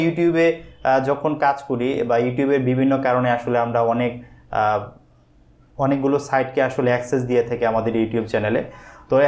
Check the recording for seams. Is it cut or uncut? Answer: uncut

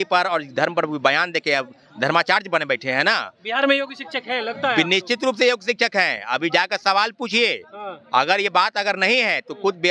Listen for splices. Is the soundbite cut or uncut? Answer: uncut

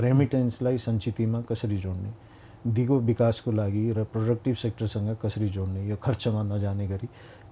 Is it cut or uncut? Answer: uncut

